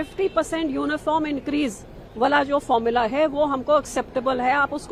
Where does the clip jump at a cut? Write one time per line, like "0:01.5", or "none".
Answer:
none